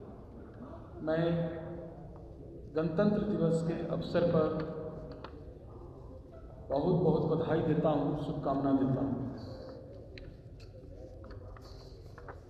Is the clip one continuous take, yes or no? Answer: yes